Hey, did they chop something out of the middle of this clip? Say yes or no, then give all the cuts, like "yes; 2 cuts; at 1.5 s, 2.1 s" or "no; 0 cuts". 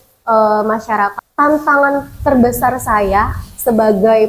yes; 1 cut; at 1.1 s